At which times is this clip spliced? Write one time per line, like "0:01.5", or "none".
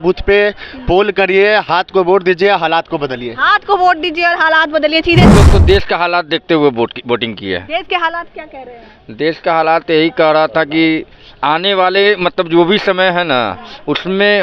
0:05.3